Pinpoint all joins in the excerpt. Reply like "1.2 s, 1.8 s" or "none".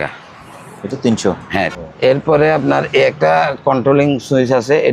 1.7 s